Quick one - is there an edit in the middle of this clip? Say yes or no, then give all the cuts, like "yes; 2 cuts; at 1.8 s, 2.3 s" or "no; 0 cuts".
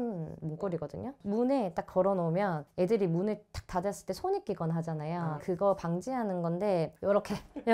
no; 0 cuts